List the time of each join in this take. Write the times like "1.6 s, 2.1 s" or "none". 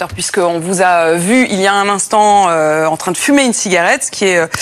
none